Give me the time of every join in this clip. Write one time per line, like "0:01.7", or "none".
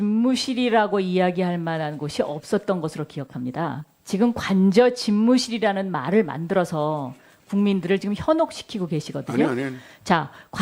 0:06.0